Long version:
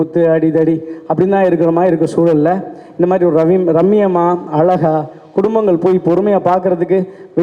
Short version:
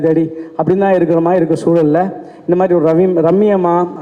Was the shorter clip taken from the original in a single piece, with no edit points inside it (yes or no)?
yes